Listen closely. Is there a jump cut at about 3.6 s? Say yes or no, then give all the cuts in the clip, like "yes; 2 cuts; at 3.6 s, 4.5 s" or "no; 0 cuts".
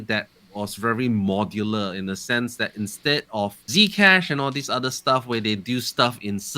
yes; 1 cut; at 3.6 s